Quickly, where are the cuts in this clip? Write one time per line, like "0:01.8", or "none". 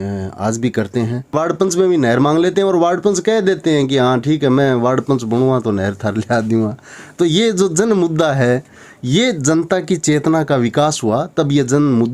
0:01.3

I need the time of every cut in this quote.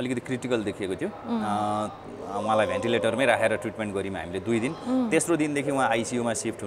none

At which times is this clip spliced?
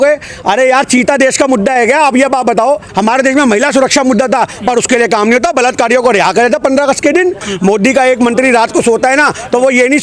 0:02.9
0:07.5

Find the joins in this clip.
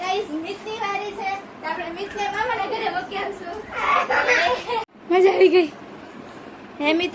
0:04.9

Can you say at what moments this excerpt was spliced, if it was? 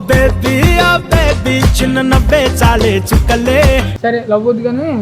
0:03.9

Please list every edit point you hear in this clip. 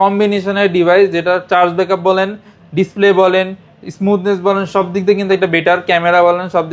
none

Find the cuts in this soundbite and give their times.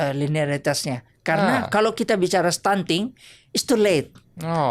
none

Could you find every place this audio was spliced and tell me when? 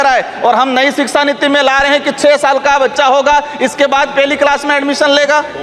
none

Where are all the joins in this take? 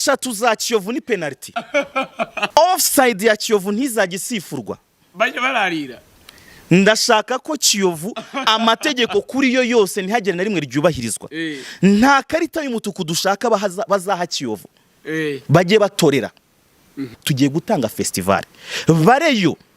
0:02.5
0:17.1

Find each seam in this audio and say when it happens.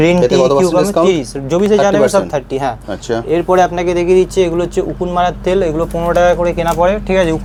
none

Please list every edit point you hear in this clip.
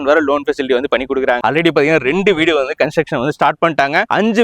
0:01.4

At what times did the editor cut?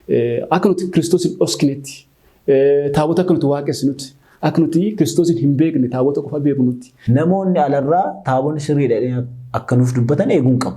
0:06.9

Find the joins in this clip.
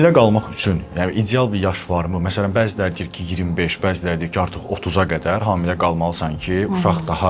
none

